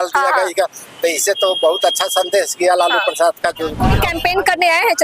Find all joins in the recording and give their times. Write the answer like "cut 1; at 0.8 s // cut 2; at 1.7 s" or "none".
cut 1; at 3.8 s